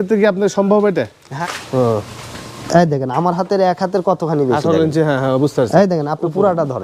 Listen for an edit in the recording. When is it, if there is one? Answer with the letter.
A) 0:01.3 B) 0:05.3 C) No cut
A